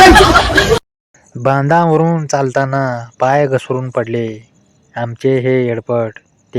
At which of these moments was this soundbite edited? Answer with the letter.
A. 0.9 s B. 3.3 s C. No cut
A